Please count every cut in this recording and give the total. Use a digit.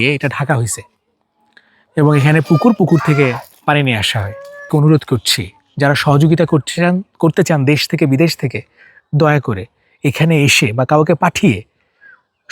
1